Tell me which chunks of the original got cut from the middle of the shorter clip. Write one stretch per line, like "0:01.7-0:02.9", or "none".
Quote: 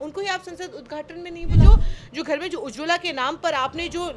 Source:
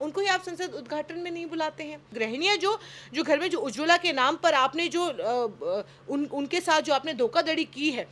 0:01.6-0:02.6